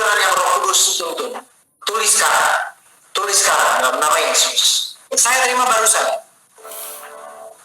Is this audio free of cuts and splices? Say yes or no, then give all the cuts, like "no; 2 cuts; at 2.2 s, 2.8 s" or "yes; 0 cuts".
no; 1 cut; at 5.1 s